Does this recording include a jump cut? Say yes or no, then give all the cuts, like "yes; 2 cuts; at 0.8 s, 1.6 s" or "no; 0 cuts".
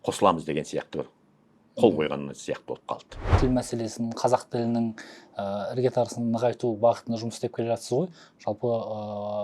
yes; 1 cut; at 3.2 s